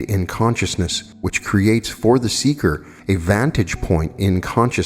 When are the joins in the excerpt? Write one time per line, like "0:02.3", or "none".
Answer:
0:01.0
0:02.9